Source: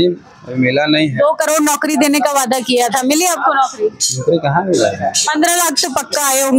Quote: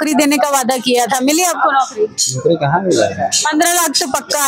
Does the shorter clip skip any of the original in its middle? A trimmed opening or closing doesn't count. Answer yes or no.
no